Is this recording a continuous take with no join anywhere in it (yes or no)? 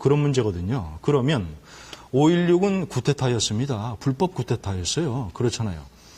yes